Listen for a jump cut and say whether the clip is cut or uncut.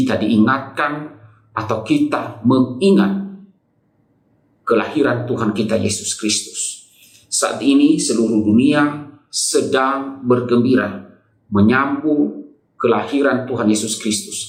uncut